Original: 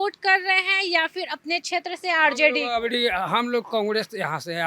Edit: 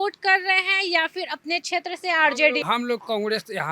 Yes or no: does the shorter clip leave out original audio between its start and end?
yes